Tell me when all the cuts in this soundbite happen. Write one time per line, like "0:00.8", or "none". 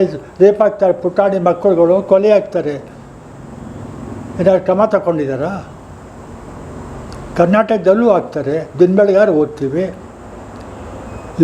none